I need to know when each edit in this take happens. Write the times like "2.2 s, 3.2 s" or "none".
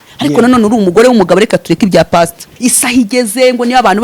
2.5 s